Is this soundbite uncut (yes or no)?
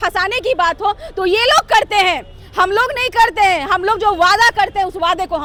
yes